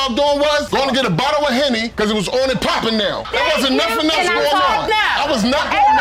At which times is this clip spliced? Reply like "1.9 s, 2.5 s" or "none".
none